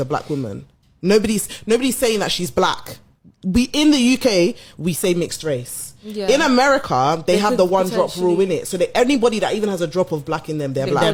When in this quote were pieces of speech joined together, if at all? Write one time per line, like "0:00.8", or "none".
none